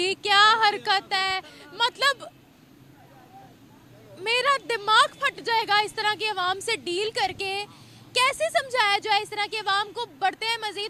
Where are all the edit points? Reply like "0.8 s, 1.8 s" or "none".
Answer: none